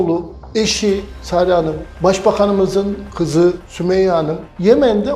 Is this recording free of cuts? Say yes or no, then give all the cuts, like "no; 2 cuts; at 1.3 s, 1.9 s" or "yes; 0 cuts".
no; 3 cuts; at 1.1 s, 1.8 s, 4.1 s